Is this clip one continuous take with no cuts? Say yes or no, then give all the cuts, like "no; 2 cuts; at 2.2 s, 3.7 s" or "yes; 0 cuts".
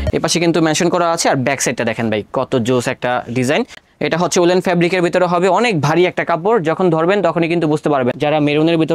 no; 2 cuts; at 3.9 s, 8.2 s